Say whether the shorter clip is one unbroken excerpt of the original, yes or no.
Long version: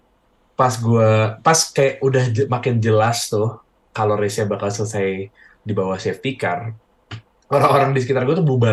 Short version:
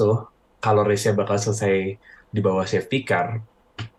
yes